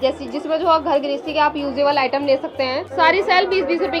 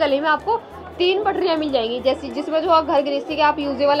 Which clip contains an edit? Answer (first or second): first